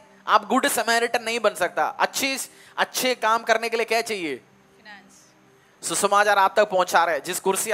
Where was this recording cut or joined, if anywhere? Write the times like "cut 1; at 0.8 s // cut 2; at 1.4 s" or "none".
none